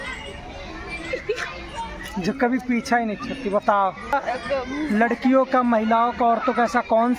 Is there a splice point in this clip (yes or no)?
yes